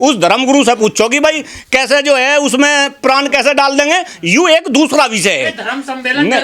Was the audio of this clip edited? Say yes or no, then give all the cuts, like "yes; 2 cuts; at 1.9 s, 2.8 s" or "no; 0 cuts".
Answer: no; 0 cuts